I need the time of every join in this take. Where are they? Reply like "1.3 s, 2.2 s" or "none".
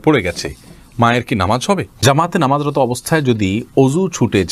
2.0 s